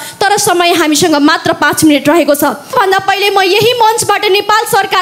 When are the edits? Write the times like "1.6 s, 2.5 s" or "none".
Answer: 2.7 s